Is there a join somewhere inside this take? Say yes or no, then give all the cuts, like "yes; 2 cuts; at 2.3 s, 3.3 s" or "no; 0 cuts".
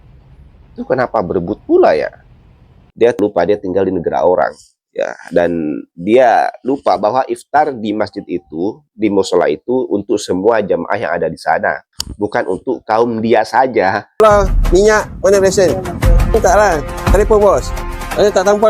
yes; 2 cuts; at 2.8 s, 14.2 s